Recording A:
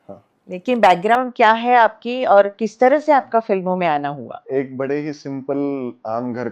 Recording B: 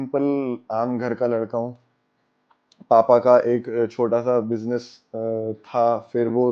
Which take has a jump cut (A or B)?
A